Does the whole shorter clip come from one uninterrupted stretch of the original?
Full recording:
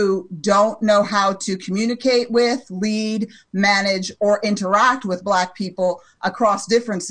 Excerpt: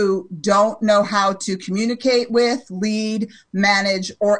yes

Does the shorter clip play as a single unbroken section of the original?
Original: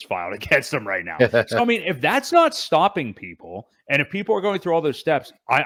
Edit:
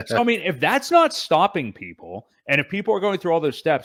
yes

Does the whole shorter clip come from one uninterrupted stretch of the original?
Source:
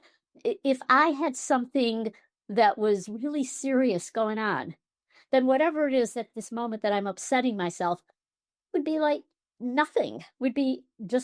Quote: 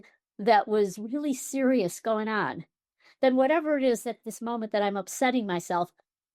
yes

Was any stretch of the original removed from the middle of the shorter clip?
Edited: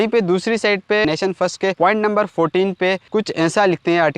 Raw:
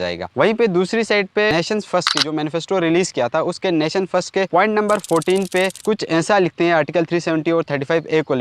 yes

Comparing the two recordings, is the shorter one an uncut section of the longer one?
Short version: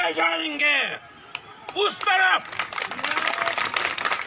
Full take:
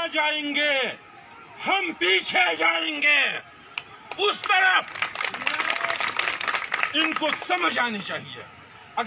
yes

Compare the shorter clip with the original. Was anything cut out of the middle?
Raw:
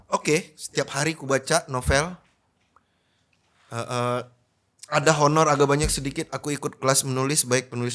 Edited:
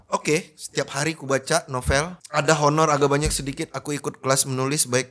yes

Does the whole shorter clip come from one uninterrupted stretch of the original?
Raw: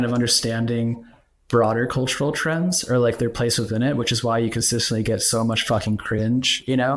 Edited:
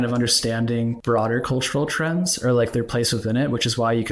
no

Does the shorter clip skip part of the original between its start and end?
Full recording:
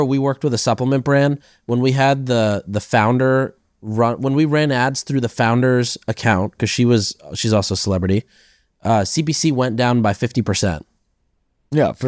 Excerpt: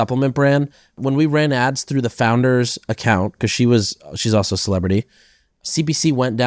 yes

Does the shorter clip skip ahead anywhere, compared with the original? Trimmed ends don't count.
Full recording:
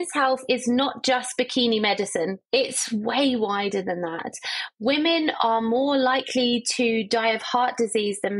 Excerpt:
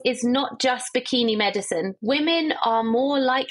yes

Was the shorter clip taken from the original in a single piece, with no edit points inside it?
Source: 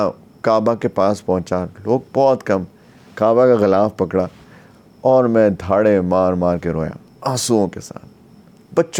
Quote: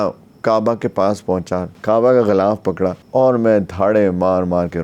no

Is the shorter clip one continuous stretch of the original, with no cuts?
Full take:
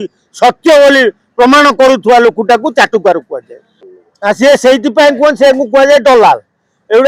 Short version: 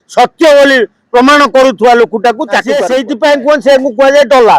no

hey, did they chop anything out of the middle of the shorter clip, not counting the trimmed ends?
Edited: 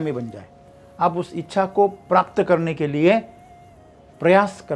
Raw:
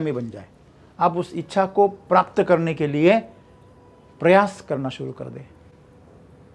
no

